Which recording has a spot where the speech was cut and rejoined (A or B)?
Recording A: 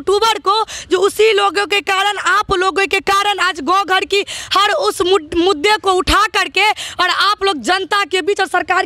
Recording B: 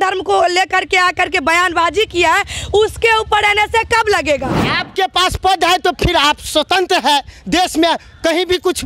B